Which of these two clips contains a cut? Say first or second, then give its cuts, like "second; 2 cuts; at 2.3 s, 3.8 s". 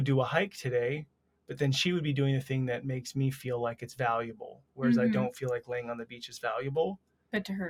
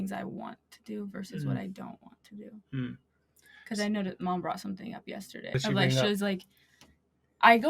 second; 1 cut; at 5.5 s